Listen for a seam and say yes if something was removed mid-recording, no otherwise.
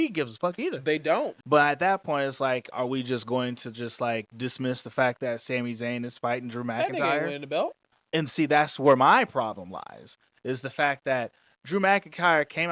yes